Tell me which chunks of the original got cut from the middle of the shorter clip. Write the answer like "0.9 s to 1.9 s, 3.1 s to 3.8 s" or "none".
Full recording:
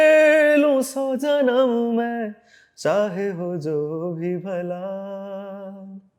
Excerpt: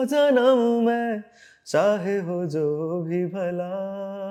none